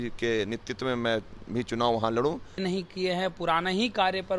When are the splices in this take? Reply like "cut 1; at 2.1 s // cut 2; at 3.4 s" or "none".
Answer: cut 1; at 2.6 s